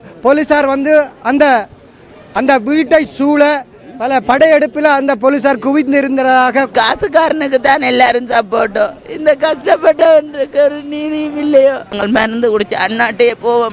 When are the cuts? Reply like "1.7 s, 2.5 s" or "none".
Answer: 6.7 s, 11.9 s